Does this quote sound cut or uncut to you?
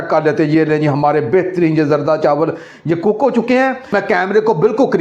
cut